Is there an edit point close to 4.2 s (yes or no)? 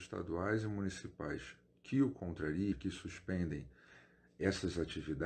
no